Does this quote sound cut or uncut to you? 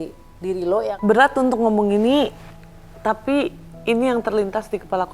cut